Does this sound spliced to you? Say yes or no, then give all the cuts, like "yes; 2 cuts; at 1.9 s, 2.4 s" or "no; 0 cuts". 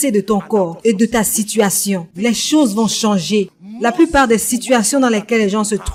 no; 0 cuts